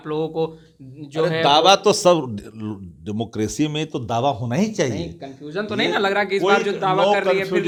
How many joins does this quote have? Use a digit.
0